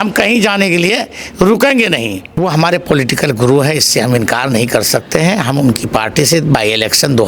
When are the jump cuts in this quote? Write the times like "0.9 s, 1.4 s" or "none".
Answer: 2.3 s